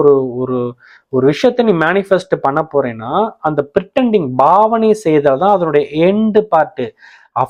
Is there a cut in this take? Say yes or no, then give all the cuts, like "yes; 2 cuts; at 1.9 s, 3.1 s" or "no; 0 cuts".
no; 0 cuts